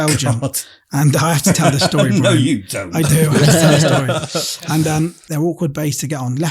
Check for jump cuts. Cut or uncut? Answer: cut